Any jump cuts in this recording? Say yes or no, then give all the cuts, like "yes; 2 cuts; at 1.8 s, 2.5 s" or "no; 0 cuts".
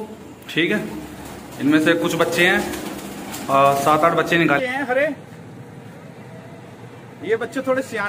yes; 1 cut; at 4.6 s